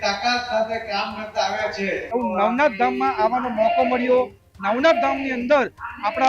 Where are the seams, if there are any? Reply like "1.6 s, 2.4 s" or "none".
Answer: 2.0 s